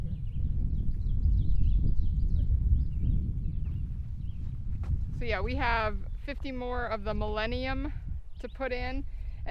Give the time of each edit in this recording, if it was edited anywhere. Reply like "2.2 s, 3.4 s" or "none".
none